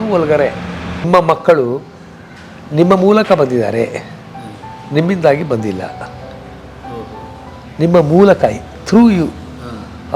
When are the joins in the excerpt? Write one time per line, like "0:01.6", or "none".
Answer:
0:01.0